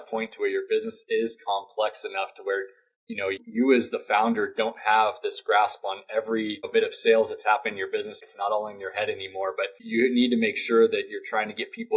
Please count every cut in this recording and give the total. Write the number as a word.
four